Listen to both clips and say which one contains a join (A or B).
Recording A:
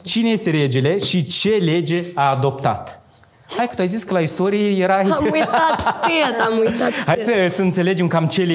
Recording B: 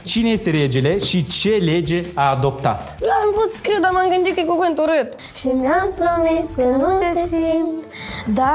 B